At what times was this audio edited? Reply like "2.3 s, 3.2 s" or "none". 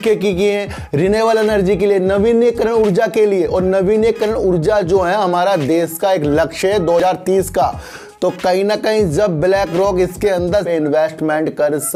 none